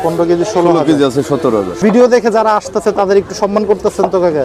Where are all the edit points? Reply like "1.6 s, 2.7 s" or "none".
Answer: 1.8 s